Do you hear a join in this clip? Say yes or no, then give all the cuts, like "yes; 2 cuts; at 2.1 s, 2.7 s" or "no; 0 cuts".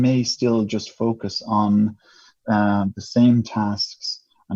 no; 0 cuts